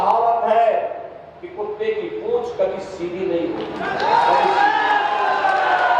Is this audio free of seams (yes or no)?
yes